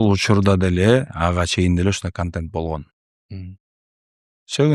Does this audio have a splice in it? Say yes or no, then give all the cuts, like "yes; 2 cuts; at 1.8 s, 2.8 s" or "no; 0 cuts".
no; 0 cuts